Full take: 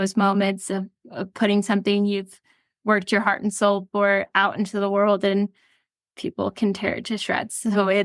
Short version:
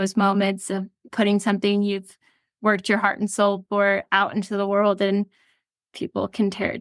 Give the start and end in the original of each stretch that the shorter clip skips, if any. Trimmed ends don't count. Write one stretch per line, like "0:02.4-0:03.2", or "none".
0:01.0-0:01.2